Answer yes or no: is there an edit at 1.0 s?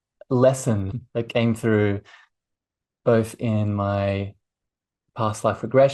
yes